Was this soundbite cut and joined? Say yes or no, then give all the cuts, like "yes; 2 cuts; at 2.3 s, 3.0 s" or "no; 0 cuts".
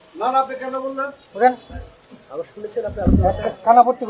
yes; 1 cut; at 1.2 s